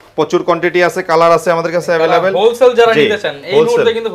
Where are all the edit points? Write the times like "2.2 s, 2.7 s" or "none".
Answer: none